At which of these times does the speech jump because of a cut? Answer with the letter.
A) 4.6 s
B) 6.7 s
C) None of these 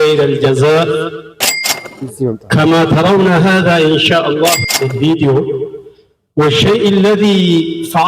A